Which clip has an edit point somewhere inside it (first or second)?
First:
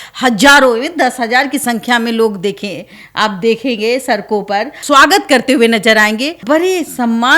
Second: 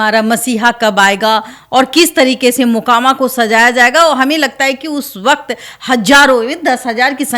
first